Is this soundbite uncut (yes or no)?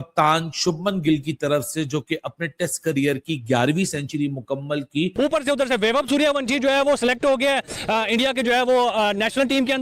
no